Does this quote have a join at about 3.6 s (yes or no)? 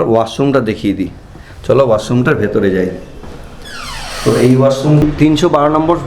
no